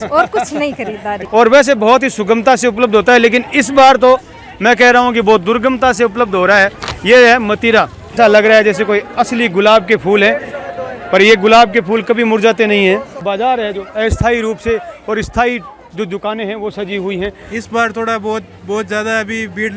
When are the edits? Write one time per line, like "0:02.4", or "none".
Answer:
0:01.2
0:08.2
0:13.2
0:17.4

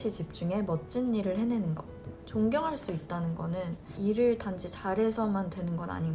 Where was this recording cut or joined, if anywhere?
0:02.0
0:03.9

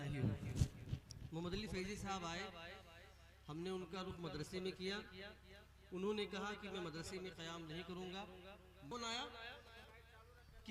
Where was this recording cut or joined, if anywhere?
0:08.9

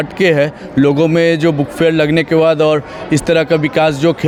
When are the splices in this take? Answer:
none

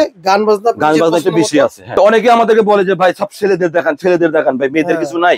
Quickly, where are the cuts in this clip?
0:01.9

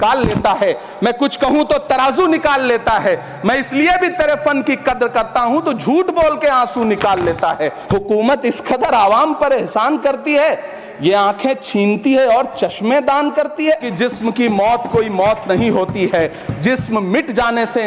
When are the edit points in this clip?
0:07.7
0:13.9

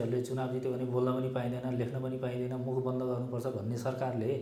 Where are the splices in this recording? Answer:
none

